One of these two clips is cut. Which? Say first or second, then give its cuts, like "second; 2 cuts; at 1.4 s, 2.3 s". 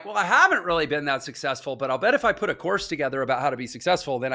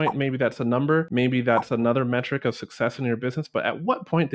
second; 1 cut; at 1.1 s